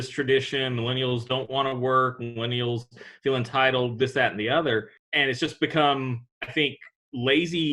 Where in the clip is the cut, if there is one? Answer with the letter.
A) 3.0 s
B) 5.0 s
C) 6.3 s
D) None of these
B